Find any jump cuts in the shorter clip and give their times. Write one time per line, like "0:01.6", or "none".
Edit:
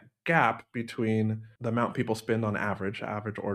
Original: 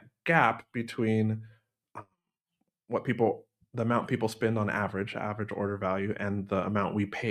0:01.5